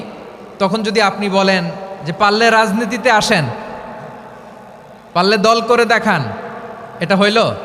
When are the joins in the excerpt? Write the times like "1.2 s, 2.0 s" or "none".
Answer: none